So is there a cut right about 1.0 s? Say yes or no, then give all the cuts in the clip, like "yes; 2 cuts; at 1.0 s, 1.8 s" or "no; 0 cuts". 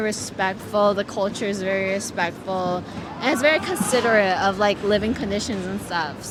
no; 0 cuts